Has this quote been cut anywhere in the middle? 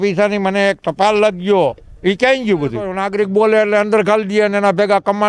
yes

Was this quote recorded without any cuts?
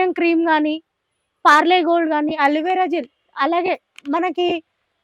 yes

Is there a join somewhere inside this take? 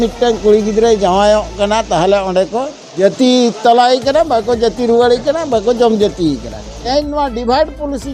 yes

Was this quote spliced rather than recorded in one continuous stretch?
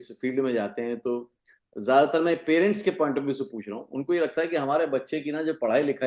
no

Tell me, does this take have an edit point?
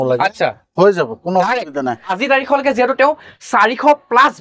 yes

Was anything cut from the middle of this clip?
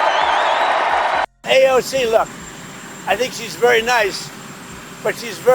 yes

